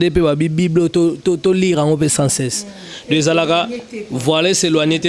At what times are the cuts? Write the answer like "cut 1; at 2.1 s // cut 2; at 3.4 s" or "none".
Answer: none